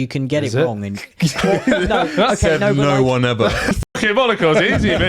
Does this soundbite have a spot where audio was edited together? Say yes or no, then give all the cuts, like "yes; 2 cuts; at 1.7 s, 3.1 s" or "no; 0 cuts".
yes; 1 cut; at 3.8 s